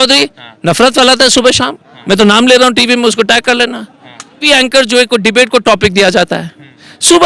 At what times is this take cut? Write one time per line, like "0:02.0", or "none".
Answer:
0:04.4